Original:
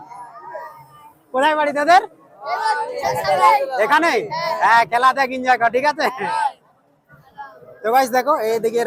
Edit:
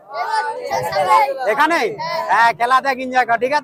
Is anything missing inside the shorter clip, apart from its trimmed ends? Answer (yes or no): no